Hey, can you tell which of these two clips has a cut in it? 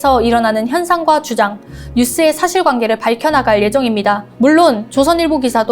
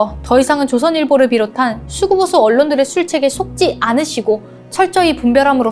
first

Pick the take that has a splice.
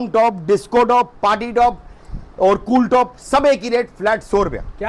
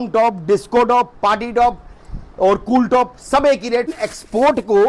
second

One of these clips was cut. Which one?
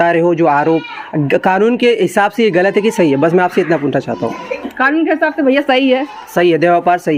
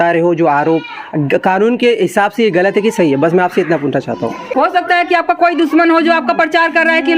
second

